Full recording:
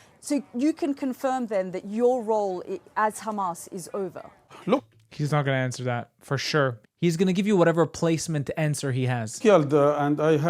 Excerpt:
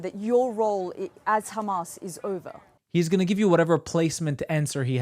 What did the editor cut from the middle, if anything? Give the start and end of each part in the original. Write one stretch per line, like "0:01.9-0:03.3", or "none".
0:04.5-0:06.9

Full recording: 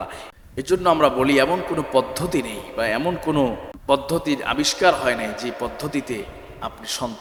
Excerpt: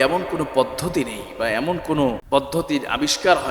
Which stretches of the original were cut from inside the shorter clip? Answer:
0:03.6-0:03.8

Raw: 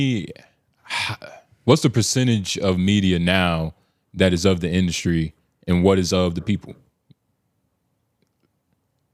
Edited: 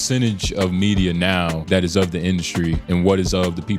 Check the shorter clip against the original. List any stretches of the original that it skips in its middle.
0:03.7-0:04.1
0:05.3-0:05.6

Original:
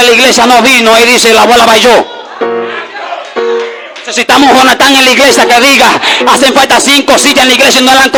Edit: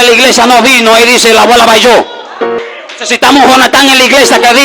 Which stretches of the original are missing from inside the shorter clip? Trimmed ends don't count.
0:02.6-0:03.7

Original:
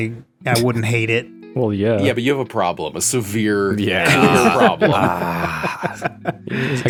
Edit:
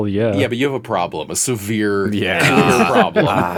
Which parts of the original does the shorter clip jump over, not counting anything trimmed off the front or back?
none

